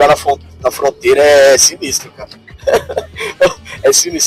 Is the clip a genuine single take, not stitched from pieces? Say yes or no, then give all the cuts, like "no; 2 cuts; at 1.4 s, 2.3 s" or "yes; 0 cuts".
yes; 0 cuts